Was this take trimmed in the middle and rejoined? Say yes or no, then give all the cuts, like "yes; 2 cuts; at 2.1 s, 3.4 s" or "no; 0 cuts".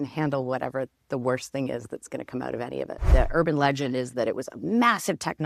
yes; 1 cut; at 3.0 s